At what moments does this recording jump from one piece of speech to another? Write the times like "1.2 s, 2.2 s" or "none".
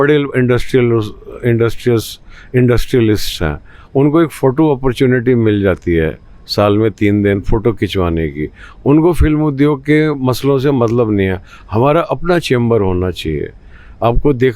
none